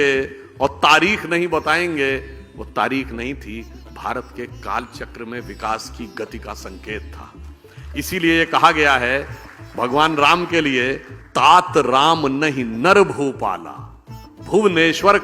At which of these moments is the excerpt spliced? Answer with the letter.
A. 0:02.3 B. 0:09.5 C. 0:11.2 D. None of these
C